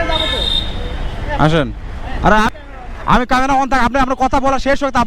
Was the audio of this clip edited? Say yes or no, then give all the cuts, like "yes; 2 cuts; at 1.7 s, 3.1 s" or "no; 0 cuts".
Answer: yes; 1 cut; at 2.5 s